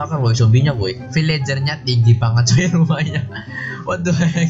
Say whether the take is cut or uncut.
cut